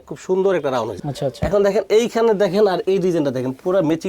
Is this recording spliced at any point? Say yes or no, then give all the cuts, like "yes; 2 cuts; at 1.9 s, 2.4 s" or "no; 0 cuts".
yes; 1 cut; at 0.9 s